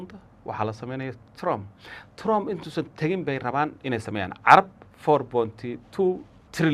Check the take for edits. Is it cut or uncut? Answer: uncut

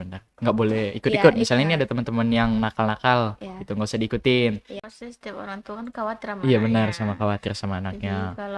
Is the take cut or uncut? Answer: cut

